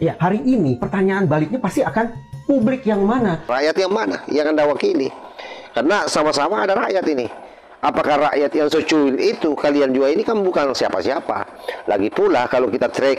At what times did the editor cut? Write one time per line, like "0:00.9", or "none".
0:03.5